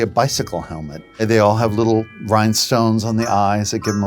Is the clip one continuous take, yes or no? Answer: no